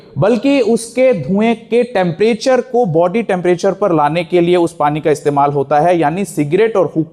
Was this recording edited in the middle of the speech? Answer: no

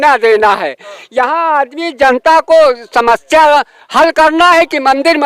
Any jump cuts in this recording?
no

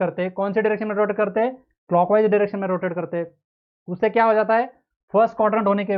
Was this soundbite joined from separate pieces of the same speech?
no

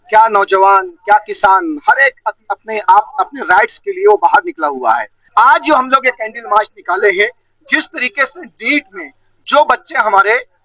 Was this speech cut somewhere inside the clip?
yes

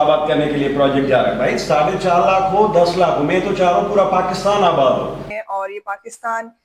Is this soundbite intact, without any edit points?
no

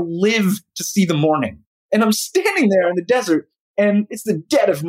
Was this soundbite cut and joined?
yes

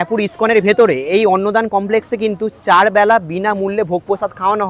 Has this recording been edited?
no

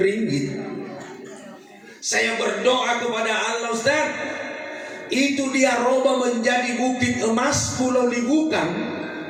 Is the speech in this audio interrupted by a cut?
no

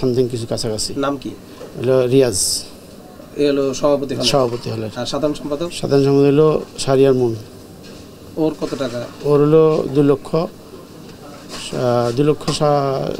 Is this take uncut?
yes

